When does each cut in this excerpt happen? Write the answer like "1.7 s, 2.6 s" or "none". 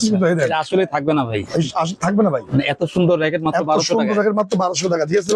none